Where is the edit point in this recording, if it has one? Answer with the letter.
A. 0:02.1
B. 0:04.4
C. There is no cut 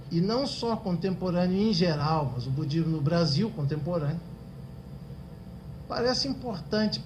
A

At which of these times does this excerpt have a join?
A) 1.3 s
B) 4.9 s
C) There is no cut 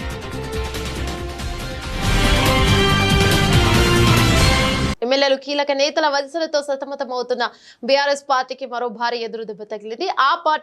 B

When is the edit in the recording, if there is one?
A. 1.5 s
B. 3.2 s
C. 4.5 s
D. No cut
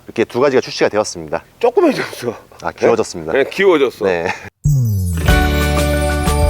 C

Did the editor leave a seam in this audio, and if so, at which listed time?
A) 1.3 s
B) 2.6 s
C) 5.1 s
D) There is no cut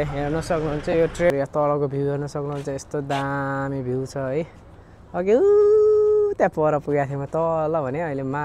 A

